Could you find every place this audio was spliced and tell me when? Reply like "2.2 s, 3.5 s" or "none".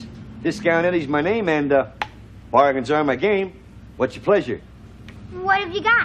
none